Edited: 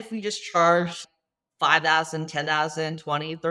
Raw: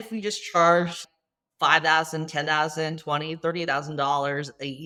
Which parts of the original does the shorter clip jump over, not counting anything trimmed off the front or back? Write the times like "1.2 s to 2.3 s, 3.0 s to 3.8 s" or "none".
none